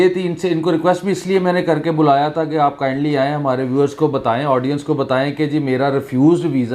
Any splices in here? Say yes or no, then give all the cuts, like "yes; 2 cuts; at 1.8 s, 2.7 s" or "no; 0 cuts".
no; 0 cuts